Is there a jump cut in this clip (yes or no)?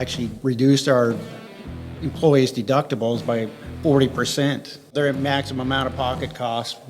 yes